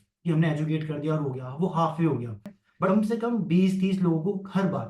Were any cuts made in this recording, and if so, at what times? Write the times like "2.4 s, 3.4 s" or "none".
2.9 s